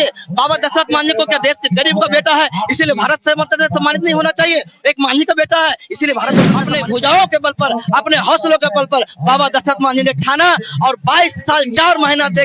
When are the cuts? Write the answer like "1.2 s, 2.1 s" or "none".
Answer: 6.6 s